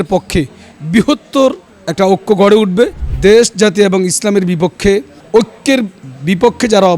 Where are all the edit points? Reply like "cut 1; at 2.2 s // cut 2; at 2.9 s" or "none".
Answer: cut 1; at 3.0 s // cut 2; at 5.2 s